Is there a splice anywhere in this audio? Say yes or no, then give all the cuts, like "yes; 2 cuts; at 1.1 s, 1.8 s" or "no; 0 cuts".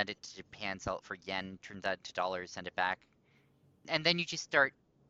yes; 1 cut; at 3.8 s